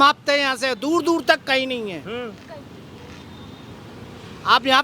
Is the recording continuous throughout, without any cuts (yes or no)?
yes